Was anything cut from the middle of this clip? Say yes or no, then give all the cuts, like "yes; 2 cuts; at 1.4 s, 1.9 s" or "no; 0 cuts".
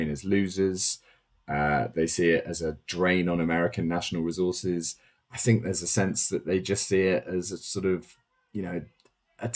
no; 0 cuts